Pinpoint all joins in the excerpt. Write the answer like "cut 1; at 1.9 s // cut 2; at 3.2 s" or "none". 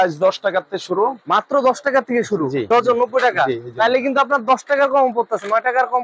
cut 1; at 2.7 s